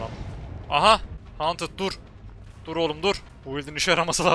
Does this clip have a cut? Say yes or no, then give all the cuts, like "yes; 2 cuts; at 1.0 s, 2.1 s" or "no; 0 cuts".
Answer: yes; 2 cuts; at 1.2 s, 3.3 s